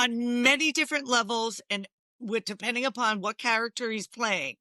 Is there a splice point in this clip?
no; 0 cuts

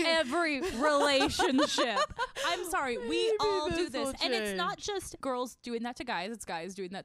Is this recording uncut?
no; 1 cut; at 5.2 s

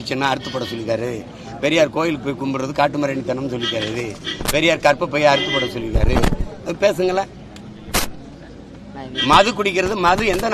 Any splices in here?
no; 0 cuts

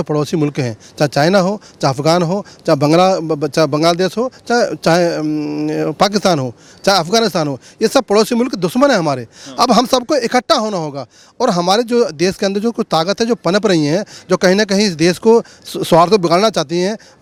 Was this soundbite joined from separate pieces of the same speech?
no; 0 cuts

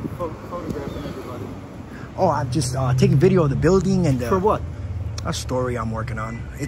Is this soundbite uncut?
yes; 0 cuts

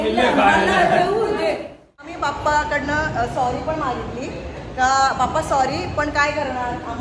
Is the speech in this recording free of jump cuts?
no; 1 cut; at 2.2 s

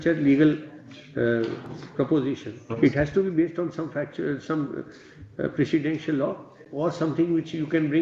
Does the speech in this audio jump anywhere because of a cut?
no; 0 cuts

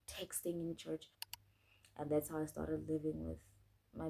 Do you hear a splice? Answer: yes; 1 cut; at 1.2 s

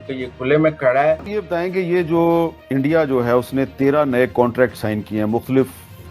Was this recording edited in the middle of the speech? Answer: yes; 1 cut; at 1.4 s

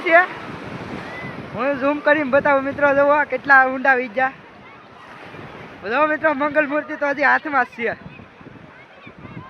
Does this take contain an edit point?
no; 0 cuts

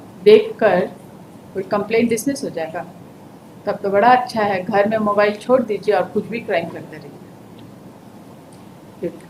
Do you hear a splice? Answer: no; 0 cuts

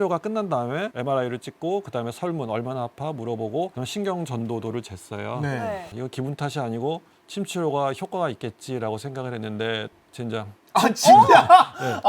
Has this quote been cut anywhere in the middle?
yes; 1 cut; at 0.9 s

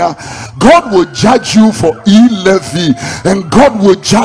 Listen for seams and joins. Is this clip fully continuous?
yes; 0 cuts

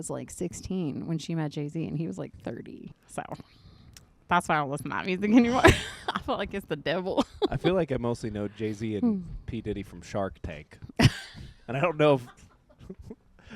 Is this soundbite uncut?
no; 1 cut; at 3.0 s

